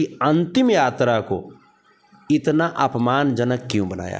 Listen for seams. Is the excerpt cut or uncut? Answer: uncut